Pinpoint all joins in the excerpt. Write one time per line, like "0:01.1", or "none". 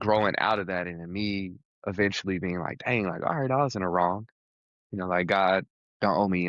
none